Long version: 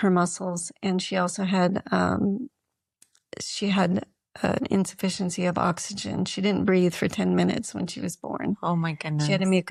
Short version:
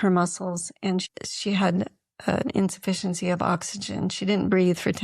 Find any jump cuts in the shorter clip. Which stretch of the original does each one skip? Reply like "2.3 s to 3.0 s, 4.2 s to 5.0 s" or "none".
1.1 s to 3.2 s